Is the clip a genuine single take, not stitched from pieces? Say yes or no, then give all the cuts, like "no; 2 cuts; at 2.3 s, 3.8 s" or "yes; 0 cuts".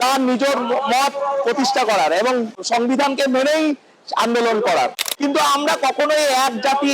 no; 2 cuts; at 2.6 s, 5.0 s